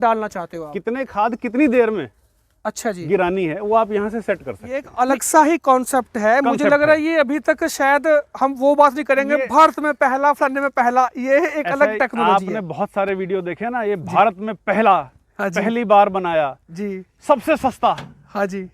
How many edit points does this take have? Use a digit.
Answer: 1